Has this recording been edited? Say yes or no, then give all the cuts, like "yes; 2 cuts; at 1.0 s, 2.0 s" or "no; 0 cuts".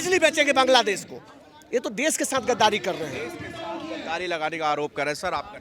no; 0 cuts